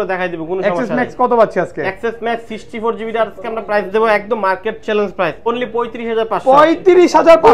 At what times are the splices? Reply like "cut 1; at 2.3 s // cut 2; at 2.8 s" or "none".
cut 1; at 5.5 s

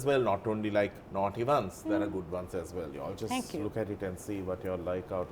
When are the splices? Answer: cut 1; at 1.0 s

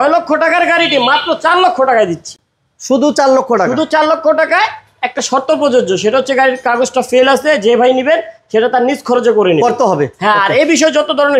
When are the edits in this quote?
none

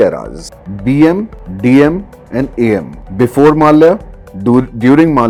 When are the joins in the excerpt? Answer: none

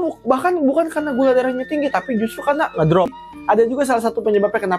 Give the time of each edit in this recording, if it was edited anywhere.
cut 1; at 3.1 s

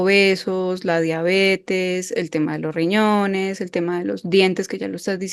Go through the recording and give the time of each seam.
none

